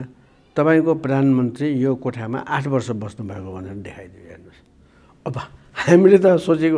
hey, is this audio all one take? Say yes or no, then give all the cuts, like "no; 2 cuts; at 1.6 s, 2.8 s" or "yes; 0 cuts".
yes; 0 cuts